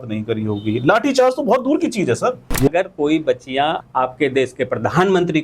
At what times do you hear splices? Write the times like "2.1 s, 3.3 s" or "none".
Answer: 2.5 s, 3.8 s